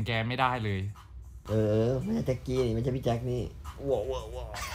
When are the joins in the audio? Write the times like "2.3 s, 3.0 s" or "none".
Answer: 1.4 s